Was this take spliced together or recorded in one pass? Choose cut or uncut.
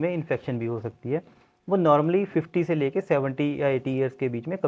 uncut